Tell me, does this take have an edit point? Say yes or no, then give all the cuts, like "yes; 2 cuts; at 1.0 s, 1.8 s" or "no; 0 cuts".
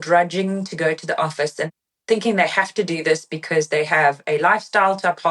yes; 1 cut; at 1.9 s